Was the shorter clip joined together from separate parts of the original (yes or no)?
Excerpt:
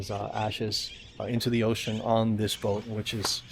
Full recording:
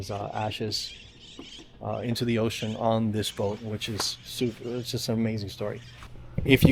yes